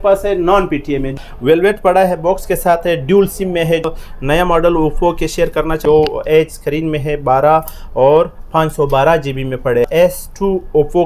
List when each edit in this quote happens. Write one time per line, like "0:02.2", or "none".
0:01.1
0:03.8
0:05.8
0:09.9

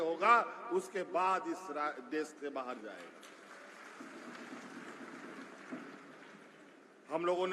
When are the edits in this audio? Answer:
none

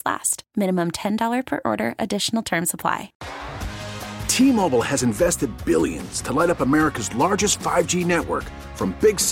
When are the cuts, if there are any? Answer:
0:03.2

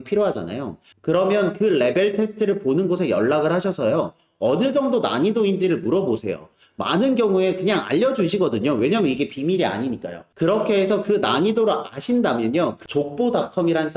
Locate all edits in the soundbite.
0:12.8

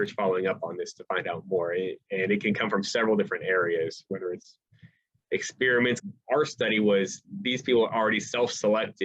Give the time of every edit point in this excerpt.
0:06.0

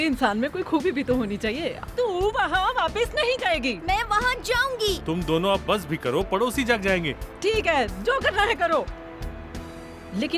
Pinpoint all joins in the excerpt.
0:01.7

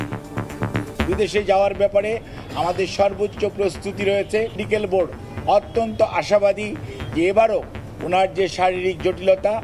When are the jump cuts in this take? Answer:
0:01.1
0:04.6

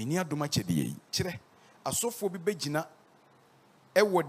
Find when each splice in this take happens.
0:01.1

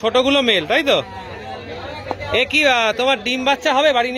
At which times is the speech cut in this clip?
none

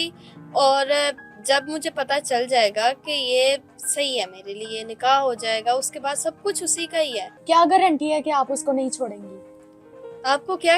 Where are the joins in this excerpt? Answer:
0:07.3

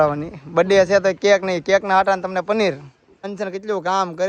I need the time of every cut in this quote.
0:03.3

